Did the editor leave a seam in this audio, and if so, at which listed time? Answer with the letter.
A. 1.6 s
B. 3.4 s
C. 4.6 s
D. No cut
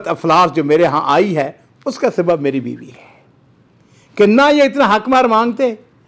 D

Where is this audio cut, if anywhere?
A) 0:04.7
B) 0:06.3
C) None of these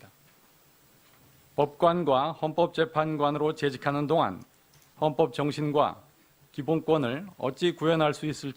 C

